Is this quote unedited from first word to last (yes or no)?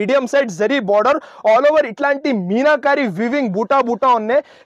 yes